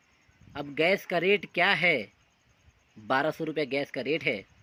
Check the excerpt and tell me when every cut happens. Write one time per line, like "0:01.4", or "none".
none